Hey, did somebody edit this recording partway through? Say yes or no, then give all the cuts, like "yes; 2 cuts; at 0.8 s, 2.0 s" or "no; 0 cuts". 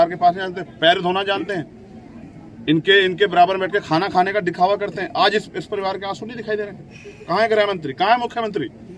no; 0 cuts